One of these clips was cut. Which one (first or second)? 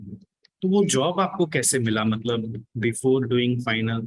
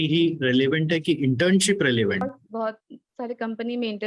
second